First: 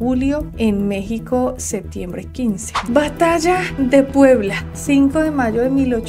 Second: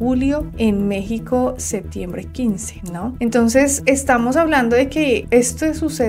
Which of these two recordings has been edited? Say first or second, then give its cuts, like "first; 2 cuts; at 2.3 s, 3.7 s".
first; 1 cut; at 2.7 s